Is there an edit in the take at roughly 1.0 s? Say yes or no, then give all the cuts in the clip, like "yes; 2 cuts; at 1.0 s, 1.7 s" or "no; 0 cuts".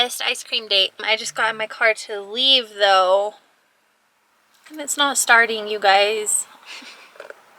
yes; 1 cut; at 1.0 s